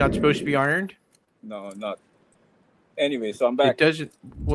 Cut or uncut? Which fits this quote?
uncut